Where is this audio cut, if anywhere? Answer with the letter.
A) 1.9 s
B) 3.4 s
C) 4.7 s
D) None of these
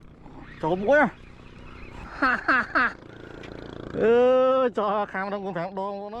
A